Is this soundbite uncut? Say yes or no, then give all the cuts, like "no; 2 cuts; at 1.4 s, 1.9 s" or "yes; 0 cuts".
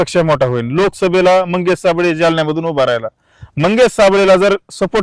yes; 0 cuts